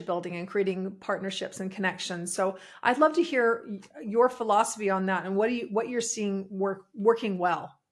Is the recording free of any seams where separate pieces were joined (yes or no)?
yes